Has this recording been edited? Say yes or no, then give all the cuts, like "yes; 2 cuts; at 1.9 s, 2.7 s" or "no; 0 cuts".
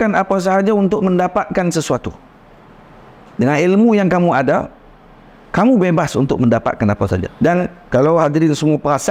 no; 0 cuts